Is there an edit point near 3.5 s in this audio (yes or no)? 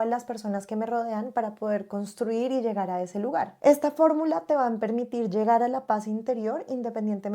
yes